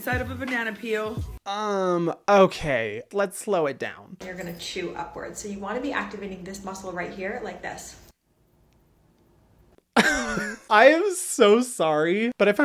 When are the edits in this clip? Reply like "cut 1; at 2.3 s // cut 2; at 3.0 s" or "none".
cut 1; at 1.3 s // cut 2; at 4.2 s // cut 3; at 10.6 s